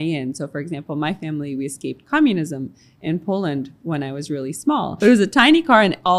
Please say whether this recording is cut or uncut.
cut